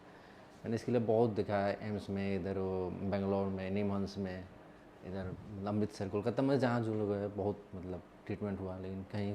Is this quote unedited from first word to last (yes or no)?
yes